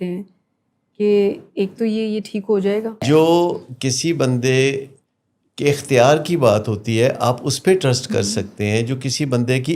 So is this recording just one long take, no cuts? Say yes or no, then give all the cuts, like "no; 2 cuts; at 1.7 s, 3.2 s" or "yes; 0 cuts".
no; 1 cut; at 3.0 s